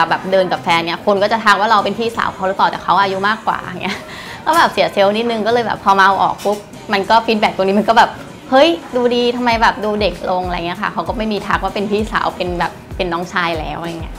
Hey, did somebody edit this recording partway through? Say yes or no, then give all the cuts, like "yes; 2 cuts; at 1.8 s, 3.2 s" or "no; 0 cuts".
yes; 1 cut; at 1.0 s